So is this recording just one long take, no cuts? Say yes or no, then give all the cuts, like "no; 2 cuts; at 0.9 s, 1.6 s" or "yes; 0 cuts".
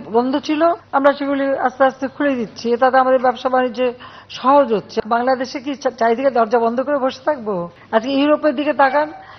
no; 3 cuts; at 0.8 s, 4.9 s, 7.7 s